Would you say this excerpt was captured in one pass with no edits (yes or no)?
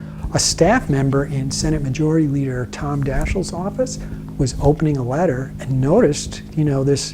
yes